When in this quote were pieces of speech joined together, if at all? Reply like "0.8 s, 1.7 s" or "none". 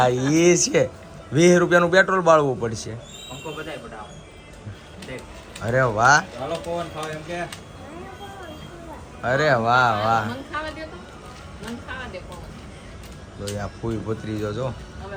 none